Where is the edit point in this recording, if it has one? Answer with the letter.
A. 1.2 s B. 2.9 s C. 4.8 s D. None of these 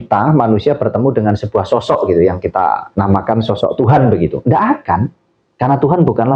B